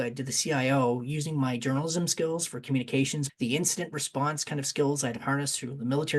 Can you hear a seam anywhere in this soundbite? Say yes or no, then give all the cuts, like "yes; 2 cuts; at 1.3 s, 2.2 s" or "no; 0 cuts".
yes; 1 cut; at 3.2 s